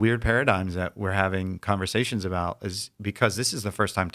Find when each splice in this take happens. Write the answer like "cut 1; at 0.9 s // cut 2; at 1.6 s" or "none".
none

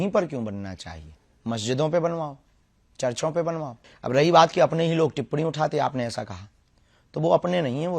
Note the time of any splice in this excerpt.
cut 1; at 3.8 s

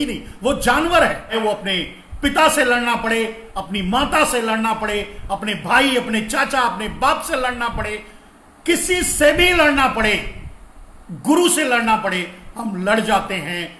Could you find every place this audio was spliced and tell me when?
cut 1; at 1.4 s

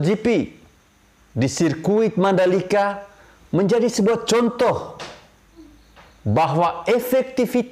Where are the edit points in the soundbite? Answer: none

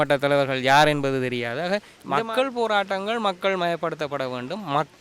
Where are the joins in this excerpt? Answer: cut 1; at 1.9 s

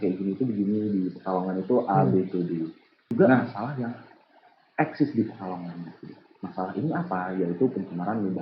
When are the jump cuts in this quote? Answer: cut 1; at 3.1 s

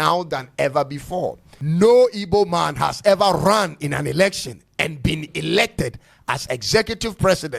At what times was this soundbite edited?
cut 1; at 1.5 s

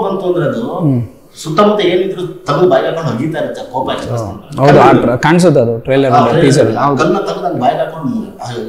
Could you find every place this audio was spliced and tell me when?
none

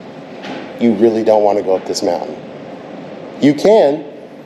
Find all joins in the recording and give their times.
none

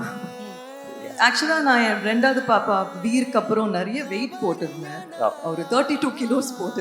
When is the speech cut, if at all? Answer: cut 1; at 0.9 s

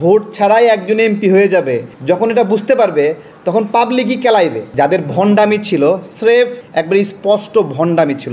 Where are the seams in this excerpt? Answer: cut 1; at 4.7 s

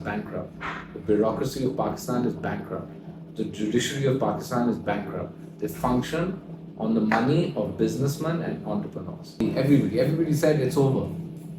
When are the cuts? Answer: cut 1; at 9.4 s

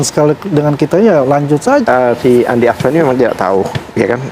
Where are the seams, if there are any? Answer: cut 1; at 1.8 s

